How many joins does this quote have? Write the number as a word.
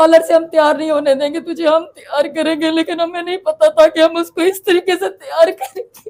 zero